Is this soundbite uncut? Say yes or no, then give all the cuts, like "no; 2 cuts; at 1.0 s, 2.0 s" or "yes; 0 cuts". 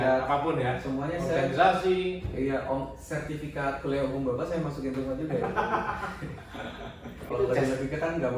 no; 1 cut; at 7.2 s